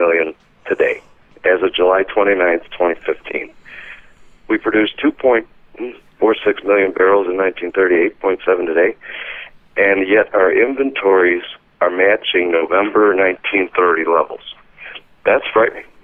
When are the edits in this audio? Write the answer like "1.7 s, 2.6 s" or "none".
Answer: none